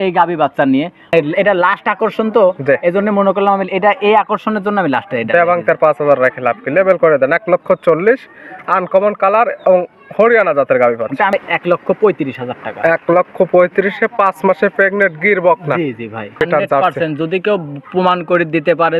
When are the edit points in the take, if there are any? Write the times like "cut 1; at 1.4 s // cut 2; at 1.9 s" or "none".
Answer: cut 1; at 1.1 s // cut 2; at 11.3 s // cut 3; at 16.4 s